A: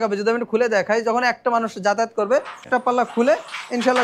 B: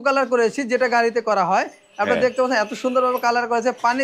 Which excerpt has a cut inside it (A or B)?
A